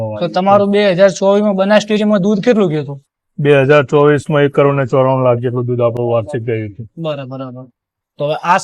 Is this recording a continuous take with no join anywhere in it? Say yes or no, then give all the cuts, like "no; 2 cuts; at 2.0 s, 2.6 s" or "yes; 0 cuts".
yes; 0 cuts